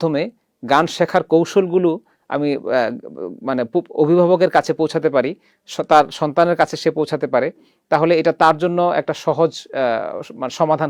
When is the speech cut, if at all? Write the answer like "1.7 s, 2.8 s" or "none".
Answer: none